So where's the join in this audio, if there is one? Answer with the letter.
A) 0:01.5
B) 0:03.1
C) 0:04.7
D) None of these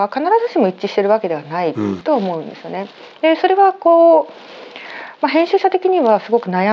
D